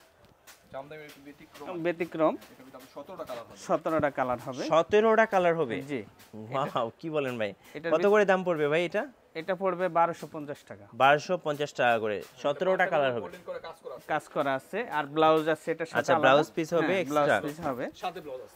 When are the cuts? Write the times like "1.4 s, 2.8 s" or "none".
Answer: none

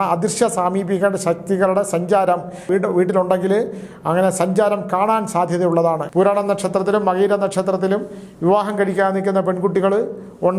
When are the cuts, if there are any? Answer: 2.6 s, 6.0 s

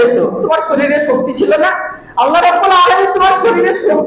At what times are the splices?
none

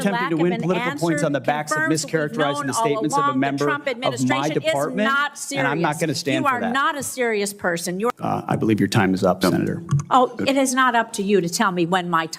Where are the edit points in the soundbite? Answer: 8.1 s

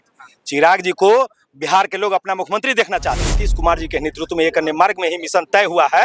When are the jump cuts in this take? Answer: 3.4 s

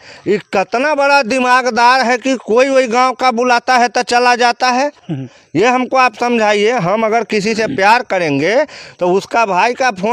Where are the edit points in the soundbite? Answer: none

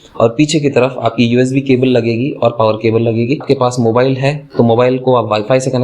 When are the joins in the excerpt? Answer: 3.4 s

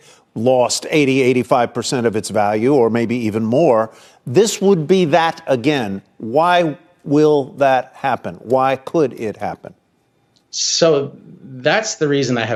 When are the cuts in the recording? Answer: none

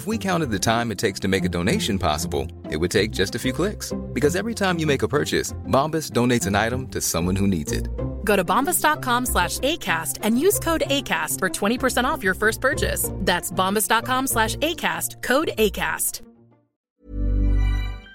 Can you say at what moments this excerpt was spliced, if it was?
17.0 s

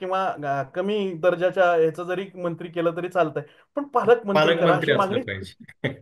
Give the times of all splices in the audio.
none

